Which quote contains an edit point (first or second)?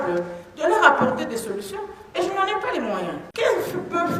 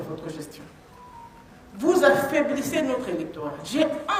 first